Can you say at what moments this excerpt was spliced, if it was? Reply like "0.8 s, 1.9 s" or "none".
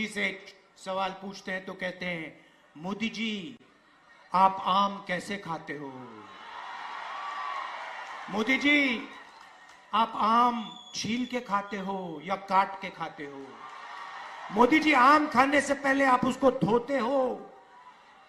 none